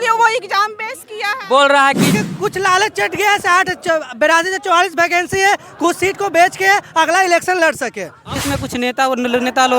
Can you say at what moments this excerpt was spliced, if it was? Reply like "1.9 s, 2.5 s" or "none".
2.1 s, 8.4 s